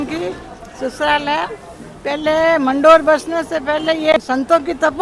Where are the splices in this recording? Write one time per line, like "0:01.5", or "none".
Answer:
0:04.1